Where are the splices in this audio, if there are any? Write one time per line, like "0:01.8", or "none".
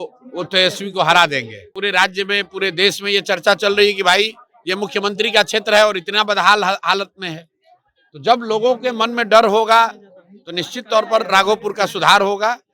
0:01.7